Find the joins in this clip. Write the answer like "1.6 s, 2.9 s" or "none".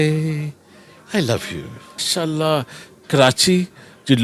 2.0 s